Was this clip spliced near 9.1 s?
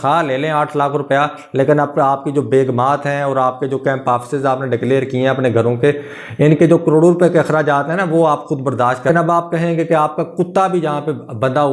yes; 1 cut; at 9.1 s

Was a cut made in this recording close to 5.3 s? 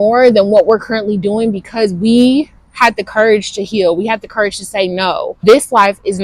yes; 1 cut; at 5.3 s

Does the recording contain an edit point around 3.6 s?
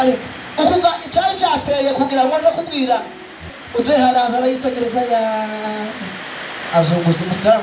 yes; 1 cut; at 3.6 s

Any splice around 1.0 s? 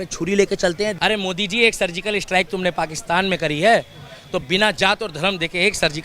yes; 1 cut; at 1.0 s

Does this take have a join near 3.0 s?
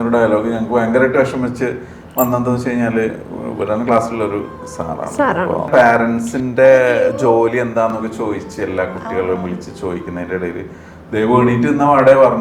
no; 1 cut; at 5.7 s

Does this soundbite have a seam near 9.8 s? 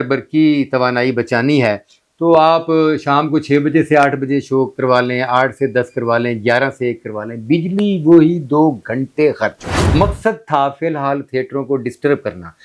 yes; 1 cut; at 9.8 s

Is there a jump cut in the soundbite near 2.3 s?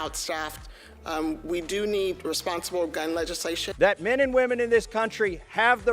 no; 1 cut; at 3.7 s

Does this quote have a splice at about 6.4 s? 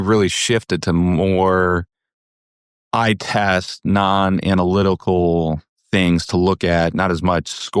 no; 0 cuts

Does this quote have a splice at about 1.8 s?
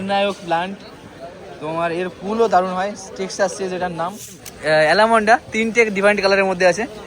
no; 1 cut; at 4.5 s

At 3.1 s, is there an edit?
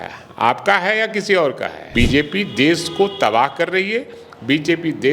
no; 1 cut; at 1.7 s

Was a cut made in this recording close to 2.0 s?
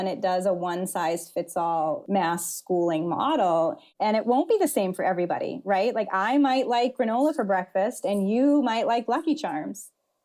yes; 2 cuts; at 2.0 s, 3.9 s

